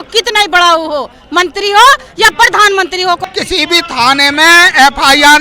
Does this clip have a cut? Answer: yes; 1 cut; at 3.2 s

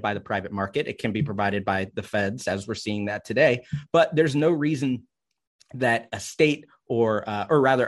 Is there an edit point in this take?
no; 0 cuts

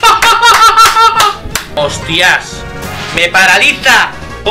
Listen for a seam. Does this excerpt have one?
yes; 1 cut; at 1.8 s

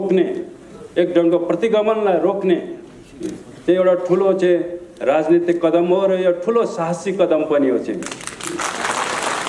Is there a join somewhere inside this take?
no; 0 cuts

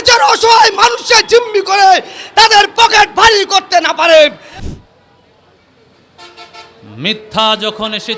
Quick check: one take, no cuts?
no; 1 cut; at 4.5 s

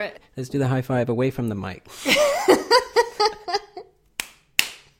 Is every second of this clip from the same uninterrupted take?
yes; 0 cuts

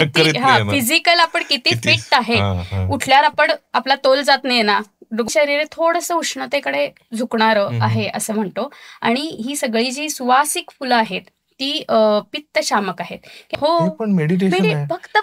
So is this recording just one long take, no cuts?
no; 2 cuts; at 5.2 s, 13.4 s

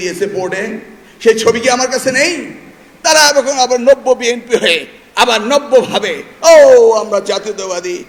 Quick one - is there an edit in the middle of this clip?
no; 0 cuts

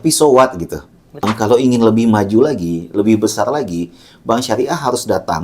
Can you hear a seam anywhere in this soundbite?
yes; 1 cut; at 1.3 s

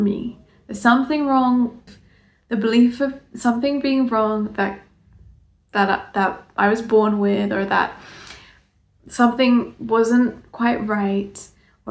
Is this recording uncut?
no; 1 cut; at 1.9 s

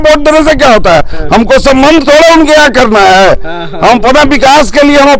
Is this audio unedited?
yes; 0 cuts

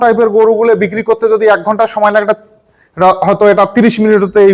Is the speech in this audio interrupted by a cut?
no; 0 cuts

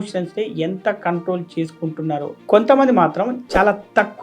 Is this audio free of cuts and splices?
no; 1 cut; at 2.3 s

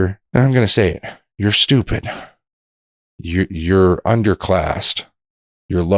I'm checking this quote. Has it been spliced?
no; 0 cuts

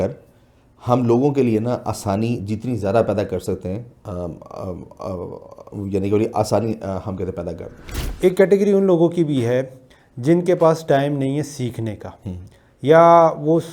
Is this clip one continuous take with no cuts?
no; 1 cut; at 8.0 s

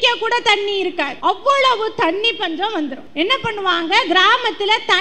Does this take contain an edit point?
yes; 2 cuts; at 1.1 s, 3.0 s

